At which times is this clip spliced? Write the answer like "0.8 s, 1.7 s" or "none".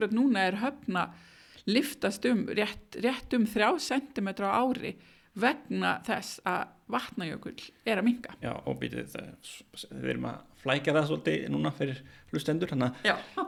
none